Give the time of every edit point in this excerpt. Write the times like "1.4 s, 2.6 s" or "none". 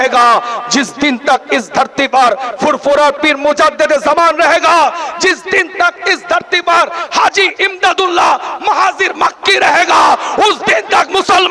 none